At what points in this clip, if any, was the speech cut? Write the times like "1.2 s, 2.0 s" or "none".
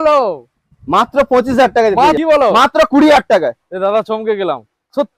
2.2 s